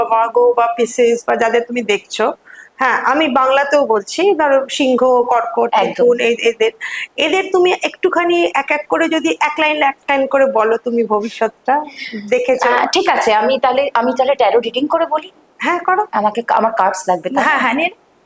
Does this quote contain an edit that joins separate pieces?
no; 0 cuts

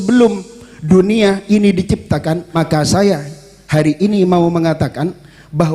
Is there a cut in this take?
yes; 1 cut; at 2.5 s

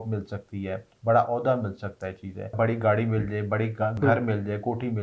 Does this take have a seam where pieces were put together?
yes; 1 cut; at 2.5 s

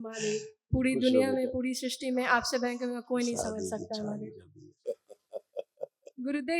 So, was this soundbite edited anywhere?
yes; 1 cut; at 4.7 s

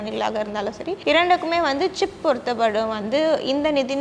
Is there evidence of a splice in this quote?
yes; 1 cut; at 1.0 s

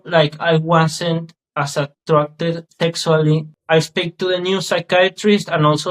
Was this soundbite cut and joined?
yes; 1 cut; at 3.5 s

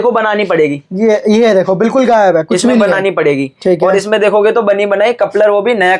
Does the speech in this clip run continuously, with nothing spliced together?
yes; 0 cuts

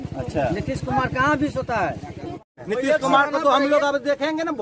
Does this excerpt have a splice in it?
yes; 1 cut; at 2.6 s

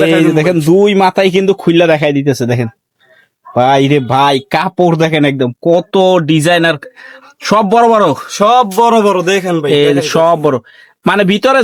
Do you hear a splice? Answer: no; 0 cuts

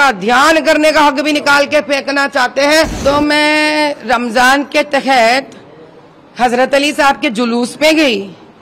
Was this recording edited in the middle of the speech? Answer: yes; 1 cut; at 3.0 s

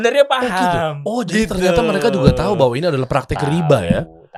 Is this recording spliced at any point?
no; 0 cuts

